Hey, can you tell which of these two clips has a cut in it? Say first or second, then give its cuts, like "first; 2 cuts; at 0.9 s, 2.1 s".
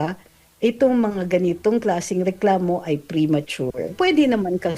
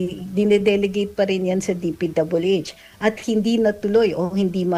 first; 1 cut; at 3.9 s